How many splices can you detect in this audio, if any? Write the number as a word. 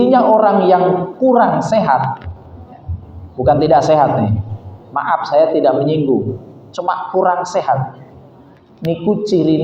zero